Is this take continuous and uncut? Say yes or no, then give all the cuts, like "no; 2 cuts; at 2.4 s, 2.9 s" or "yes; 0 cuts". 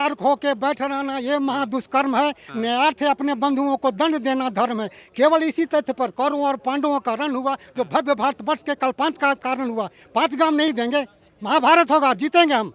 yes; 0 cuts